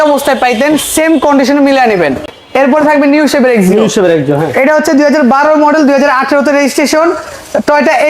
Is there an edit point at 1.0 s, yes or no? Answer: no